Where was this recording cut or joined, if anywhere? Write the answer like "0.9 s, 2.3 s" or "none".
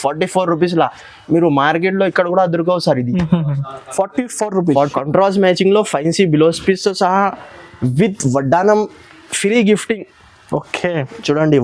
4.8 s

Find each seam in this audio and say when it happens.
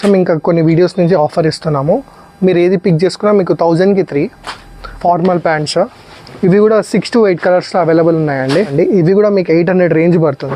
5.0 s, 8.7 s

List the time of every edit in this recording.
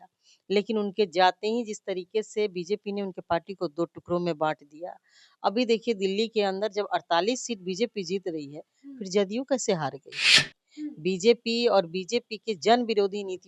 10.5 s

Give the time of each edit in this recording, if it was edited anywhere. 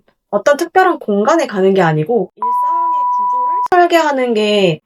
none

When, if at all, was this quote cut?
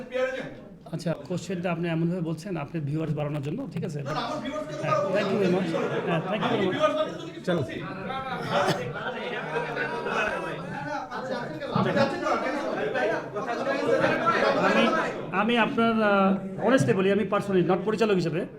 1.1 s

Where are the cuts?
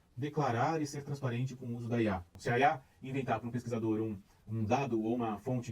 2.3 s

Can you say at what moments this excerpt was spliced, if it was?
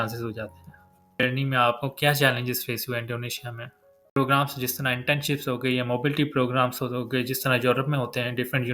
1.2 s, 4.2 s

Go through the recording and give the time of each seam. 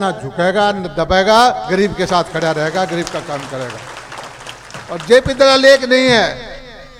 none

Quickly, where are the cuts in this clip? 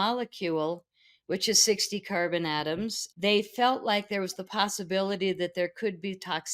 3.0 s

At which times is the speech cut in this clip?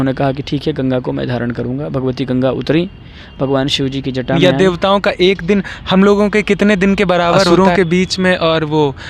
4.4 s, 7.5 s

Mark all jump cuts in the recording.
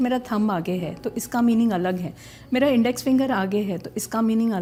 none

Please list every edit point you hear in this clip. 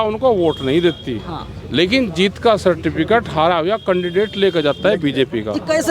none

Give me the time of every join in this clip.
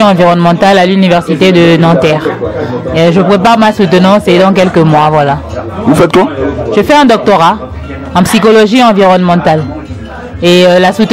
none

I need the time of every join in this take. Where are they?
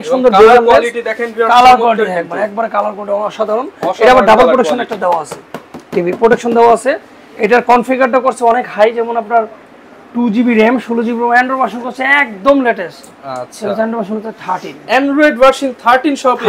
none

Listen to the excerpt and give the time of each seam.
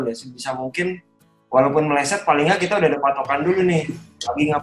none

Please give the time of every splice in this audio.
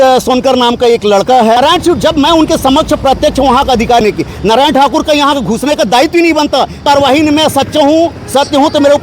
1.6 s, 4.0 s, 6.8 s

